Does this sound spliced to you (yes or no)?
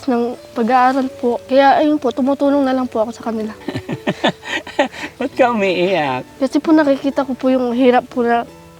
yes